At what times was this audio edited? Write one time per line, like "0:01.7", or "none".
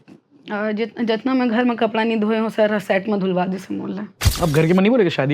0:04.3